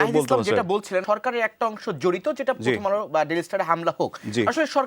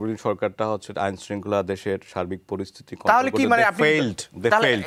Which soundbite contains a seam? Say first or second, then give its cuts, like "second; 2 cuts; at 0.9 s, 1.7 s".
first; 1 cut; at 1.0 s